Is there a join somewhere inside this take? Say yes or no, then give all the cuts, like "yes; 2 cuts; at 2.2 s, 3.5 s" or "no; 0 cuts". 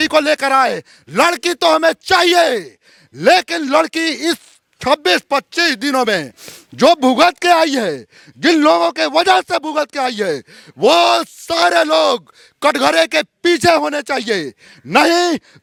no; 0 cuts